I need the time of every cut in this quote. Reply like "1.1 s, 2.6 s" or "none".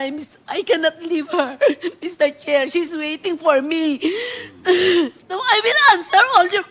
5.3 s